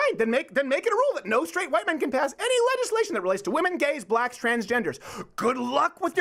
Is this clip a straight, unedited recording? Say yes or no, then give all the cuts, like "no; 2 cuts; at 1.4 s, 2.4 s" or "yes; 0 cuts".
yes; 0 cuts